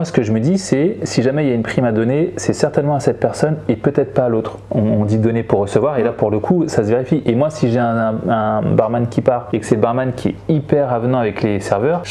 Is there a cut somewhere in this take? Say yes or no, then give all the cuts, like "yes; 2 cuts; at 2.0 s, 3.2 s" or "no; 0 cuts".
no; 0 cuts